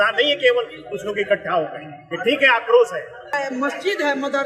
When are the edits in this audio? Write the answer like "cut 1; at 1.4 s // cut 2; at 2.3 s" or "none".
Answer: cut 1; at 3.3 s